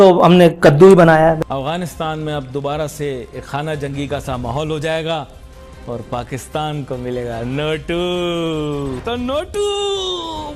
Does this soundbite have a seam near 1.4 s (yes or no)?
yes